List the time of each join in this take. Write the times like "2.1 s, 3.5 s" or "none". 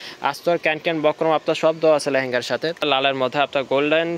2.8 s